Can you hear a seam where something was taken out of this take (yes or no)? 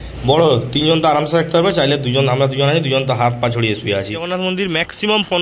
yes